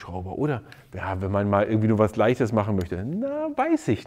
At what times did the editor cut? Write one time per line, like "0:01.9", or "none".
none